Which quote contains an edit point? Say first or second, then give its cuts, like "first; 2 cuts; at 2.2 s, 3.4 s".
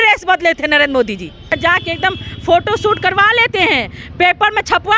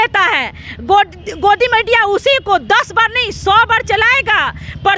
first; 1 cut; at 1.6 s